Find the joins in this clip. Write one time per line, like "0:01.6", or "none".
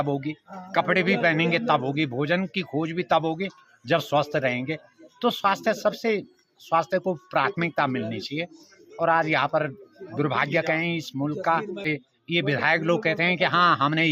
0:11.8